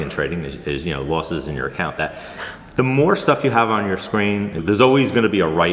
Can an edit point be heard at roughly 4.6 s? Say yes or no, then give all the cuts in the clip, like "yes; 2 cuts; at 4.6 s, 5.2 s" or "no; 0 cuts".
yes; 1 cut; at 4.6 s